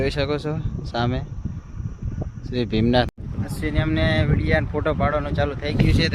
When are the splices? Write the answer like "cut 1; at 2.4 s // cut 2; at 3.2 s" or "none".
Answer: cut 1; at 3.1 s